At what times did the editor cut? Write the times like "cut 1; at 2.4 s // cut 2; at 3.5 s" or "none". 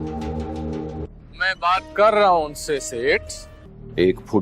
cut 1; at 1.1 s

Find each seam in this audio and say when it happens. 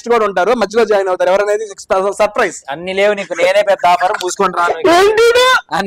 none

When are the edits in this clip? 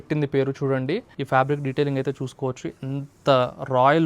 cut 1; at 1.2 s

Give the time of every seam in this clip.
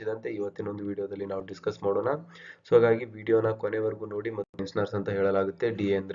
cut 1; at 4.6 s

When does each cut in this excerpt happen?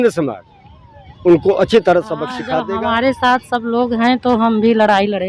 cut 1; at 2.5 s

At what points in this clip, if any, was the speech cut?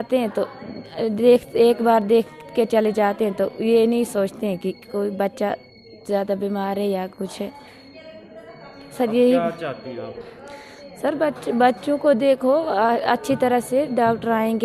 none

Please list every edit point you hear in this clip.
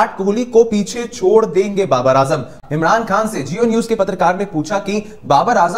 cut 1; at 2.6 s

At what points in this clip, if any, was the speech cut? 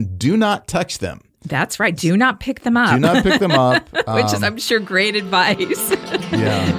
none

